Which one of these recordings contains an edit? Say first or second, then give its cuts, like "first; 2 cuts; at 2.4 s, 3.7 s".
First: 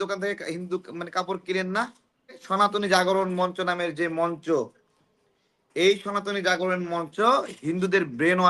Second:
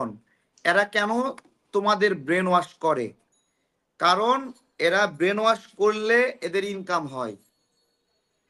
first; 1 cut; at 2.4 s